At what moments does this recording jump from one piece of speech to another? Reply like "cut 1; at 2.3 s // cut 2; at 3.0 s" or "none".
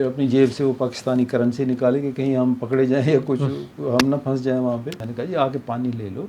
cut 1; at 5.1 s